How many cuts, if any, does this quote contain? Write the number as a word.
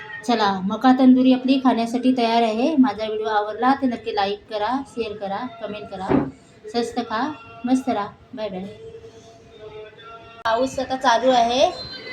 one